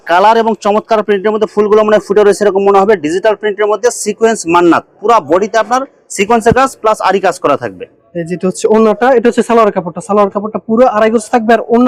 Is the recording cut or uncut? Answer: uncut